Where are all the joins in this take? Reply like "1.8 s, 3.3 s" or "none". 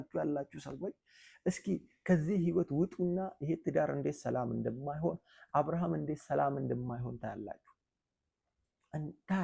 8.6 s